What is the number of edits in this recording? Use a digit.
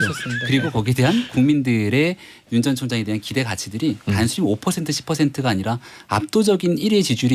0